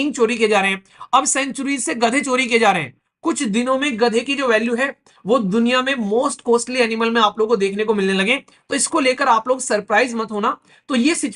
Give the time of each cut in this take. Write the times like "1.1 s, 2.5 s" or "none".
none